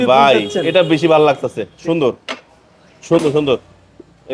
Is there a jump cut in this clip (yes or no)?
no